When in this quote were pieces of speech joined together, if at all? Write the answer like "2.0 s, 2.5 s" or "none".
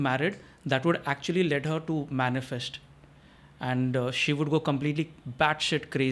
none